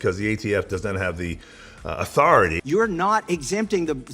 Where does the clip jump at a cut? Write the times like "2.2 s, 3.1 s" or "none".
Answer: 2.6 s